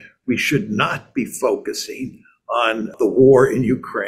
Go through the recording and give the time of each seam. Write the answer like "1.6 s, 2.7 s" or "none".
2.9 s